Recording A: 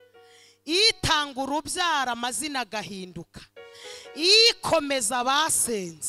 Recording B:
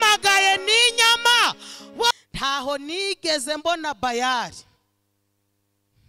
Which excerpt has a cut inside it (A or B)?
B